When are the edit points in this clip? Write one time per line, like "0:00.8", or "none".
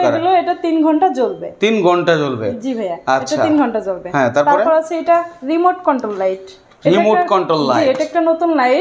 none